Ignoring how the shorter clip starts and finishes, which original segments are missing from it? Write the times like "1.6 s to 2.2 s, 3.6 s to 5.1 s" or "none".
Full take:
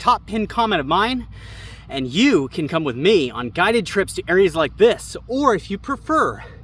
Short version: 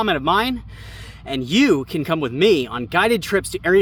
none